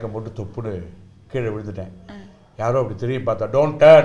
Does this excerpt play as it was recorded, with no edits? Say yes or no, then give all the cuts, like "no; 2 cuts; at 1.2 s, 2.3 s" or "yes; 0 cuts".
yes; 0 cuts